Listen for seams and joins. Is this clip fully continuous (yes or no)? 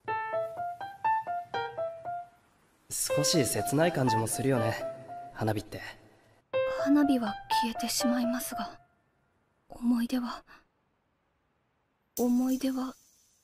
yes